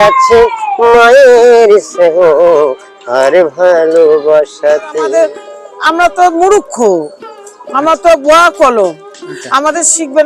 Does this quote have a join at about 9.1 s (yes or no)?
no